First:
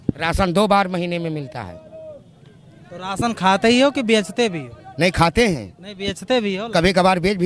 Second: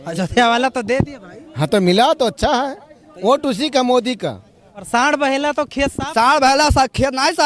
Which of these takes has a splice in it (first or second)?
second